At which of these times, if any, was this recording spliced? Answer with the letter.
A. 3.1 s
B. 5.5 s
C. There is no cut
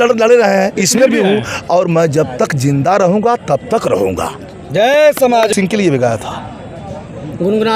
B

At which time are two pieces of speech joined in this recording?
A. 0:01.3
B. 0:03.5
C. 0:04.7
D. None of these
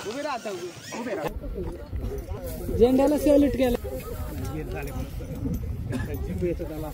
D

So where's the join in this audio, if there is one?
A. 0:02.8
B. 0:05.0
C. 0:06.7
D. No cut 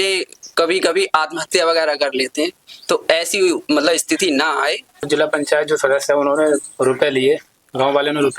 B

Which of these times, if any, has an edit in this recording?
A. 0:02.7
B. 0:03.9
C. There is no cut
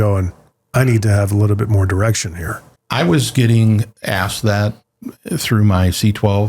A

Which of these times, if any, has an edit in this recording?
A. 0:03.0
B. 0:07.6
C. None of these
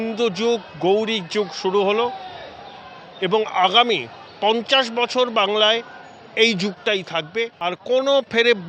B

